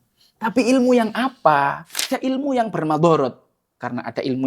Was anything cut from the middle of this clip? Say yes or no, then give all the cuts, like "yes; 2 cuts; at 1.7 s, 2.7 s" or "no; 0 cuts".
yes; 1 cut; at 2.1 s